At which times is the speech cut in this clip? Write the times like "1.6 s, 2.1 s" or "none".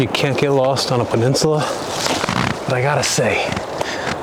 none